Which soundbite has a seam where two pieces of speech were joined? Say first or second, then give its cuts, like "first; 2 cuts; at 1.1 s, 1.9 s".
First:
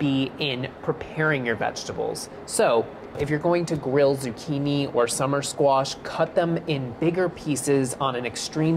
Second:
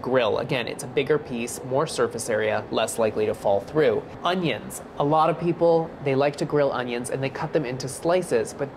second; 1 cut; at 2.9 s